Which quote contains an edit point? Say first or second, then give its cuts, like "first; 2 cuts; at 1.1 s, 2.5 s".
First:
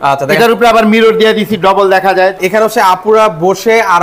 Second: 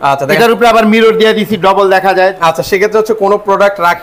first; 1 cut; at 2.4 s